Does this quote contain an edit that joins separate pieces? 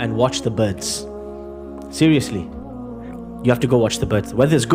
no; 0 cuts

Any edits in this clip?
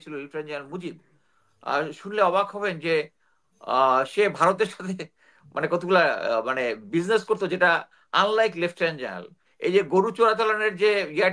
no; 0 cuts

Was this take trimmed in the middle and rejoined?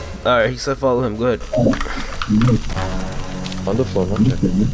no; 0 cuts

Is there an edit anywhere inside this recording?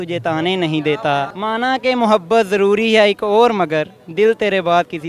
yes; 1 cut; at 1.3 s

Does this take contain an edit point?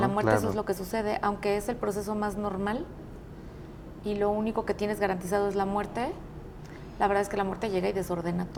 no; 0 cuts

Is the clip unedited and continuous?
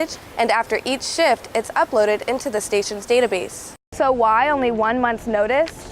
no; 1 cut; at 3.8 s

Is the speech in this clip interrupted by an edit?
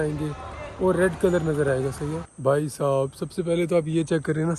yes; 1 cut; at 2.3 s

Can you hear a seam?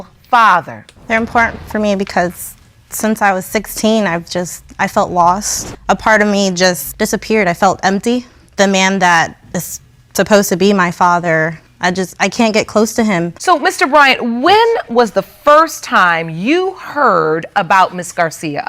yes; 2 cuts; at 0.9 s, 13.3 s

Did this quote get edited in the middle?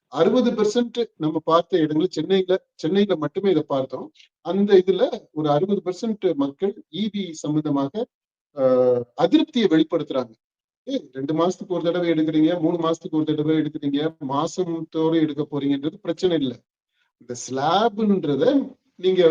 yes; 1 cut; at 10.9 s

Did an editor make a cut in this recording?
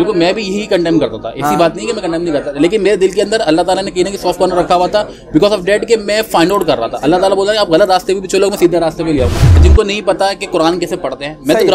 yes; 1 cut; at 9.6 s

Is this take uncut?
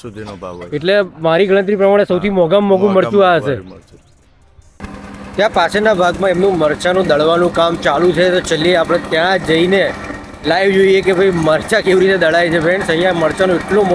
yes; 0 cuts

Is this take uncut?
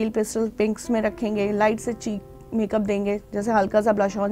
yes; 0 cuts

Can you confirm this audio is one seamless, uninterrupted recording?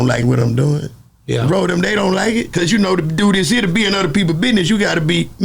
yes; 0 cuts

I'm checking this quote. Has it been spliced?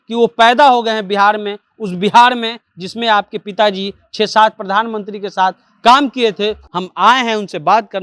yes; 1 cut; at 6.6 s

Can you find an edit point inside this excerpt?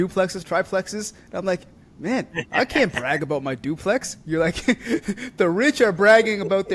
no; 0 cuts

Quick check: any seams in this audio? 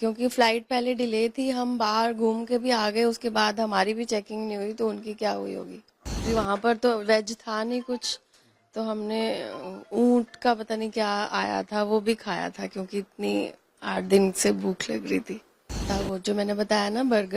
yes; 2 cuts; at 6.2 s, 15.8 s

